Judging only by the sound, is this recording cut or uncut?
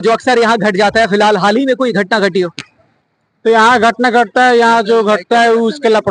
uncut